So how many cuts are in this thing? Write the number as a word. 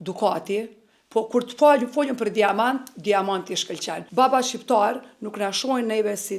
one